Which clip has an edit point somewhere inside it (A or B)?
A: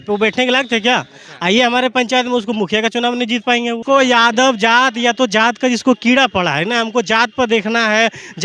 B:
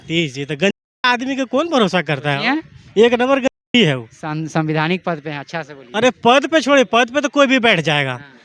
A